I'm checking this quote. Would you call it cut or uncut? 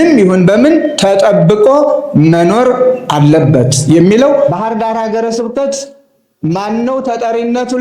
cut